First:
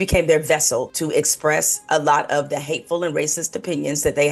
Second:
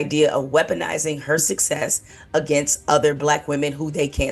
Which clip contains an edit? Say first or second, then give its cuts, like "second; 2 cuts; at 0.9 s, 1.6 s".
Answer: first; 1 cut; at 0.9 s